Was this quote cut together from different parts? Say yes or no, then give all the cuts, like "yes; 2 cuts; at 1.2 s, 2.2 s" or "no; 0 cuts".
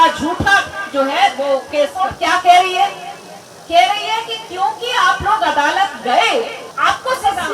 yes; 2 cuts; at 1.9 s, 6.6 s